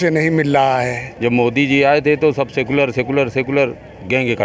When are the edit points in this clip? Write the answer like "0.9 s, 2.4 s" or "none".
1.0 s